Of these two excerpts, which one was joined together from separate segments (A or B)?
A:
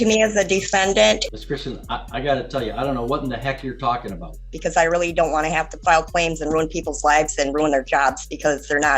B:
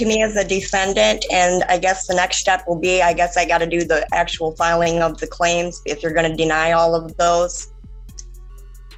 A